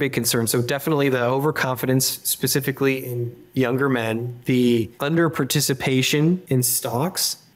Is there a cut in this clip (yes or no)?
no